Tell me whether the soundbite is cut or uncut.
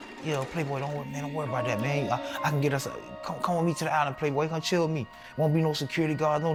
uncut